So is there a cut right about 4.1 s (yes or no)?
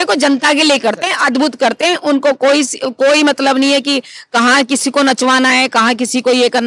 no